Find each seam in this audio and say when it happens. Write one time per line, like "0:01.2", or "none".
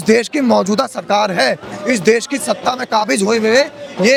none